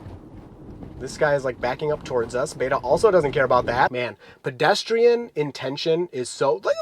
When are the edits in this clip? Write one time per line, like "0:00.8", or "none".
0:04.0